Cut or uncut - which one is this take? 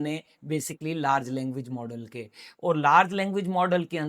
uncut